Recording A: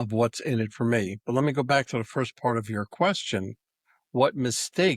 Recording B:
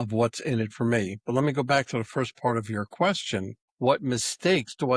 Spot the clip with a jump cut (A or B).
B